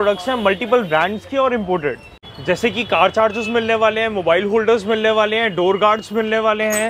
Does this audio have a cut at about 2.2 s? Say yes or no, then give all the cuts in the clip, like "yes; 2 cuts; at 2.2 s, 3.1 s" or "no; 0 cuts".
yes; 1 cut; at 2.2 s